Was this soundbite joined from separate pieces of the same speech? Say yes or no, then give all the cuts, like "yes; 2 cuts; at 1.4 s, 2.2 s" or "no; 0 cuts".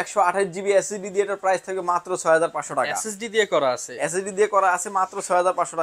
no; 0 cuts